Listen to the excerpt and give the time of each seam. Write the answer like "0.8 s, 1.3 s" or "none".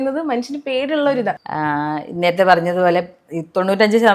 1.4 s